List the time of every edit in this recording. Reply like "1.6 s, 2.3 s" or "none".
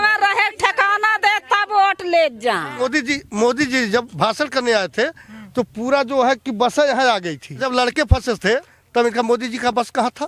2.8 s, 7.6 s, 8.8 s